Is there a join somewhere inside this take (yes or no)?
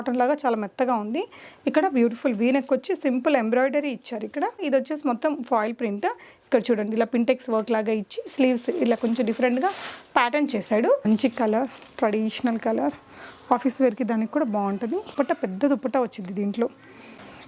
yes